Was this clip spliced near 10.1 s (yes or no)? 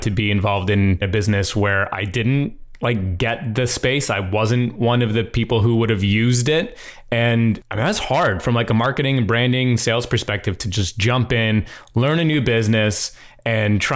no